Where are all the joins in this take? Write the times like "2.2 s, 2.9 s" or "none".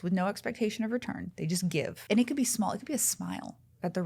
2.0 s

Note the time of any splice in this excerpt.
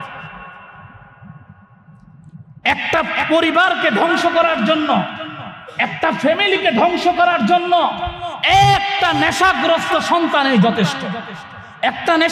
none

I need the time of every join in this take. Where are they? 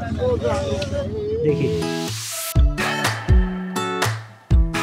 1.8 s

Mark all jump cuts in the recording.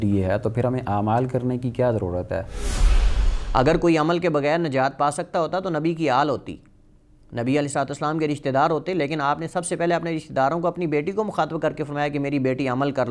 3.0 s

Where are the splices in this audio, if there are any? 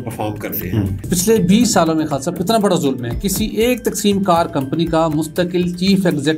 1.0 s

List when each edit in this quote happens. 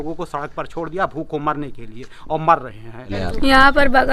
3.1 s

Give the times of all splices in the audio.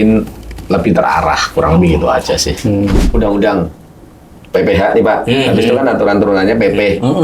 3.0 s

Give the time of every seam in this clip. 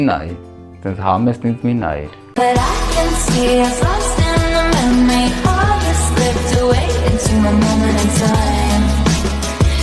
2.3 s

